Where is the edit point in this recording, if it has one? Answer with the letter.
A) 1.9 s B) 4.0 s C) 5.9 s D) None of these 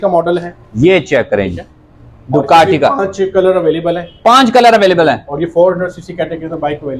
D